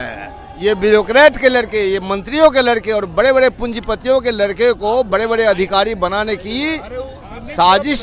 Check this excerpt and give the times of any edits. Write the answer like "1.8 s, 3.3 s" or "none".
none